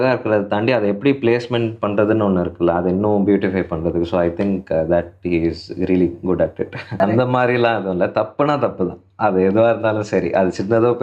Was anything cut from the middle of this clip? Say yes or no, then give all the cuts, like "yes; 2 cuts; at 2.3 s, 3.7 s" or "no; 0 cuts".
yes; 1 cut; at 7.0 s